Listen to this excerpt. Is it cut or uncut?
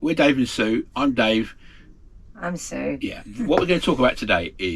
cut